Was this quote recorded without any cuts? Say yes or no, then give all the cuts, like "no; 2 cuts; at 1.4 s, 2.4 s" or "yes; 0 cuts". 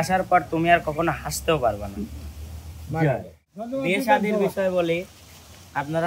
no; 1 cut; at 3.6 s